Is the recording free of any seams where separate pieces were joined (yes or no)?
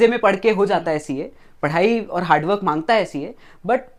yes